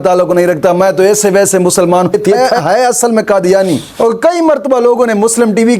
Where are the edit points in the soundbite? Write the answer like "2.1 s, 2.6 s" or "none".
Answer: 2.3 s, 3.9 s